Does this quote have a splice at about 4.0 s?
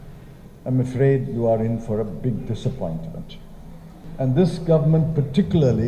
yes; 1 cut; at 4.0 s

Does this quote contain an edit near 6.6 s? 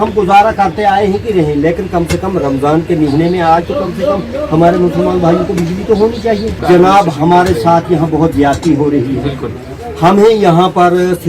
yes; 1 cut; at 6.6 s

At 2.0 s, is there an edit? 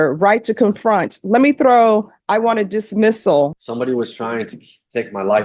no; 1 cut; at 3.5 s

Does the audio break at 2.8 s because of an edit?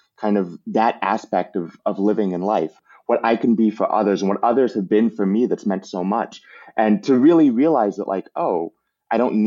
yes; 1 cut; at 2.8 s

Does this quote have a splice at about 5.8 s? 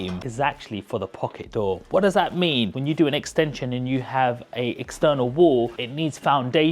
yes; 2 cuts; at 2.7 s, 5.8 s

